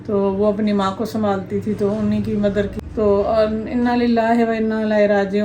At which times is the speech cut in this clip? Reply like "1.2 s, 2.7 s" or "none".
2.7 s